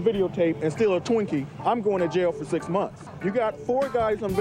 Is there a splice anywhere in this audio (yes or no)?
yes